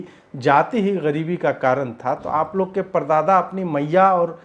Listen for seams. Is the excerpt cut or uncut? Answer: uncut